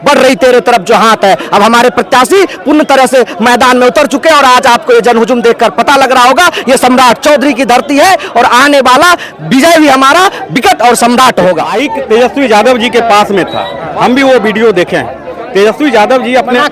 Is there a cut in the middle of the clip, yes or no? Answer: yes